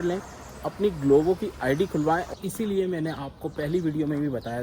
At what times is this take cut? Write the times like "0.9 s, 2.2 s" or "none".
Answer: 2.3 s